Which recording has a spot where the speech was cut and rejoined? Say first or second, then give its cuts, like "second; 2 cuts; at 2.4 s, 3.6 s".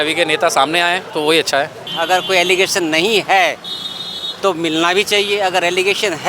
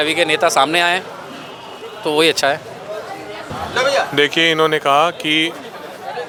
first; 2 cuts; at 1.1 s, 1.8 s